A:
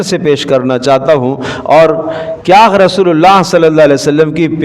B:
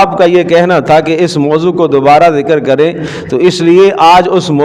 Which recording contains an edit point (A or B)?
A